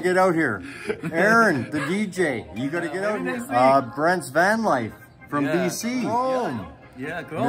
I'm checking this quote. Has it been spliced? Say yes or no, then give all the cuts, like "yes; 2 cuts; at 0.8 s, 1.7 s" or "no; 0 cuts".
yes; 2 cuts; at 3.1 s, 6.1 s